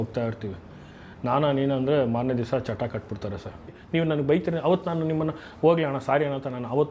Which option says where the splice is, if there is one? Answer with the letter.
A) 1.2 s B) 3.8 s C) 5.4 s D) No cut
B